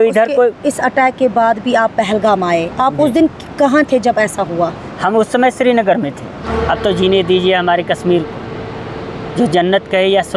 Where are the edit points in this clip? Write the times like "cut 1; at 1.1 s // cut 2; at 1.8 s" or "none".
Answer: cut 1; at 6.5 s